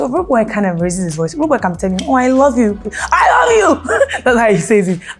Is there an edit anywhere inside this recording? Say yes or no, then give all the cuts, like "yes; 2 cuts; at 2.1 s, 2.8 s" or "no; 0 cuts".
no; 0 cuts